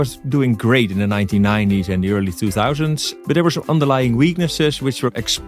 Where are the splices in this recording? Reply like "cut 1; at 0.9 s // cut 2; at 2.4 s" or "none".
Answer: cut 1; at 3.1 s